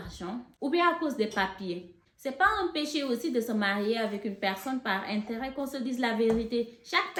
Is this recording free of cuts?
yes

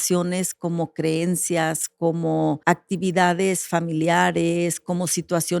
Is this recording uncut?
no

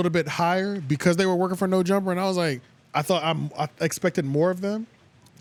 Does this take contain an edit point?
no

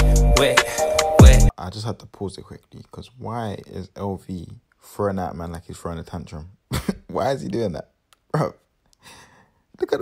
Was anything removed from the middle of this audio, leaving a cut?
yes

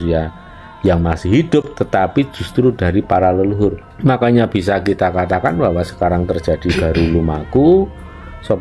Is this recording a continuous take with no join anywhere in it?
yes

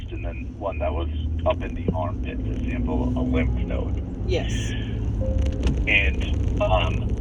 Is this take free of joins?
yes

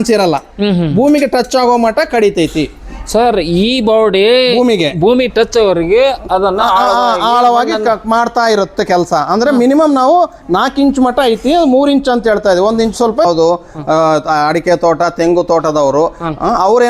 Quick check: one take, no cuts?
no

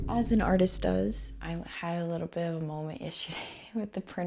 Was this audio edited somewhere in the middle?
yes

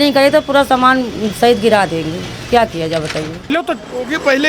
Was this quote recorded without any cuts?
no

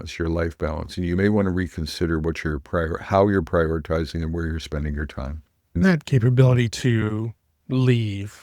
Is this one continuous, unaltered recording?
no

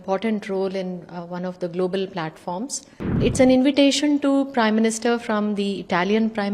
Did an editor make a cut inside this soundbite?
yes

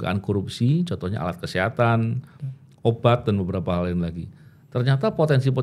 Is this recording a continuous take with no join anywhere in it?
yes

